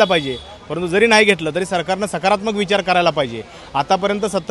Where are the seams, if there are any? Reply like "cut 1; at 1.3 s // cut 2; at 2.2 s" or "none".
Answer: none